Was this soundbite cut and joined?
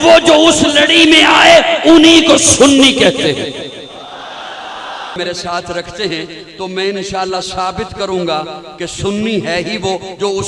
yes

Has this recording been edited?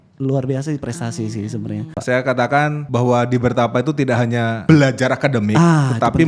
yes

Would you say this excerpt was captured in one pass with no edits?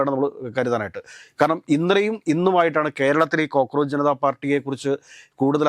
yes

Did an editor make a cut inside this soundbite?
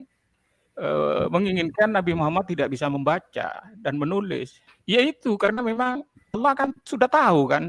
no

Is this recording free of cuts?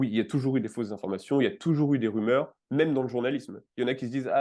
yes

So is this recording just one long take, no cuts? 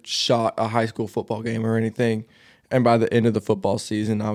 yes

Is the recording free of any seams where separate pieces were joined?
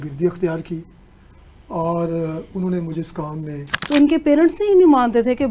no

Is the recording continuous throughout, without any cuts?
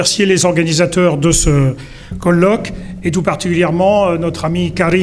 no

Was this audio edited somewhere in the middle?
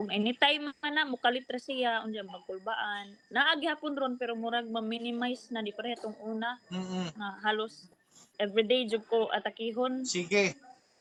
no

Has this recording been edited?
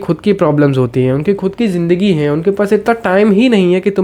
no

